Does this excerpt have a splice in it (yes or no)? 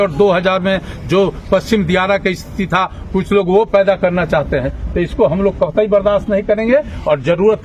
no